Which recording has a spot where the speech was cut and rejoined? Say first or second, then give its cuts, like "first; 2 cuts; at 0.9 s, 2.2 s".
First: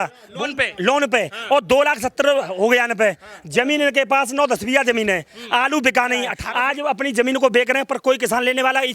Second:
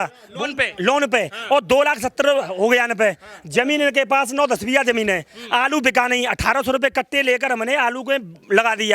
first; 1 cut; at 6.4 s